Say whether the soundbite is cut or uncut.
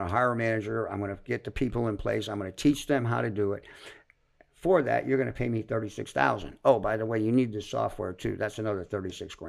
uncut